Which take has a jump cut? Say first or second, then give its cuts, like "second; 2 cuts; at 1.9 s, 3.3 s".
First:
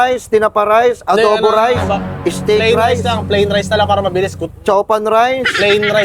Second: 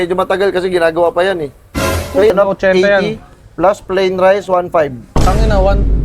second; 1 cut; at 2.3 s